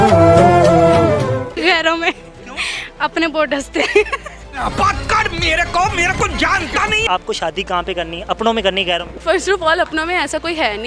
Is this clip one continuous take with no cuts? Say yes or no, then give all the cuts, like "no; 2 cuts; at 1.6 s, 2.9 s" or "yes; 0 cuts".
no; 3 cuts; at 1.6 s, 7.1 s, 9.2 s